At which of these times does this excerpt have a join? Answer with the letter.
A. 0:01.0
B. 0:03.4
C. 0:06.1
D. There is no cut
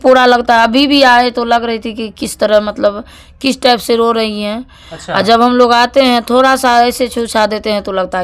D